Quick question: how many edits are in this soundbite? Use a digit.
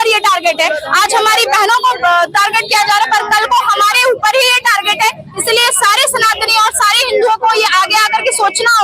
0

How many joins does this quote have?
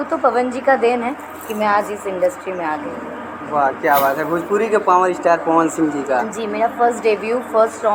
0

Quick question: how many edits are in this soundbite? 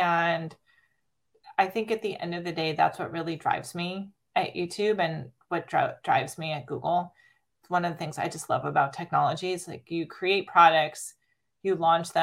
1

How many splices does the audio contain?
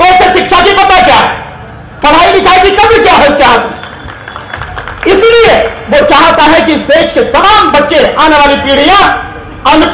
0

